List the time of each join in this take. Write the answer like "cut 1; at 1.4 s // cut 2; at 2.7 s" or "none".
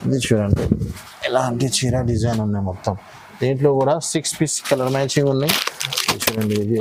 none

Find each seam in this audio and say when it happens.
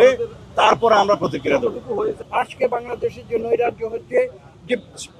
cut 1; at 2.2 s

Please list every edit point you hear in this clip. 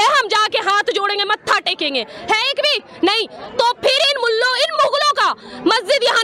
none

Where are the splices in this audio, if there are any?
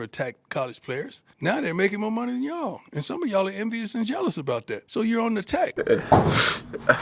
cut 1; at 1.2 s // cut 2; at 4.8 s // cut 3; at 5.7 s

